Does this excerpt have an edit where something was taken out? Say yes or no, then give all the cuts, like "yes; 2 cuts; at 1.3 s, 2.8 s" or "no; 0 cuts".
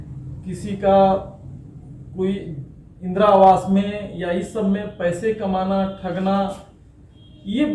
no; 0 cuts